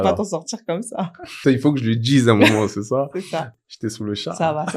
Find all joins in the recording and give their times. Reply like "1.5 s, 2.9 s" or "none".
1.4 s, 3.5 s